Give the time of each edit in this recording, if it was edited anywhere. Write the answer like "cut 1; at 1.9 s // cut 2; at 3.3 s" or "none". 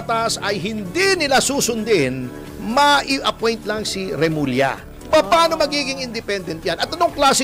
none